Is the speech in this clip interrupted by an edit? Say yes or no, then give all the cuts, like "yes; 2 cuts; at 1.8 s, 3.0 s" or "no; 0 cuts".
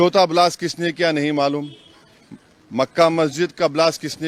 no; 0 cuts